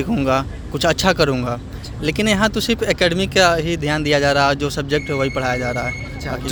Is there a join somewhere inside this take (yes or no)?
no